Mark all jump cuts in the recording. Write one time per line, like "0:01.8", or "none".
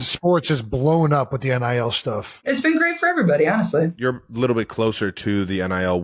0:02.4
0:04.0